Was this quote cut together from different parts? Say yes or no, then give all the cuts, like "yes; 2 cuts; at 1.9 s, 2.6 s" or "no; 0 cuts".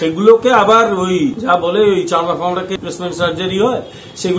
yes; 2 cuts; at 1.4 s, 2.8 s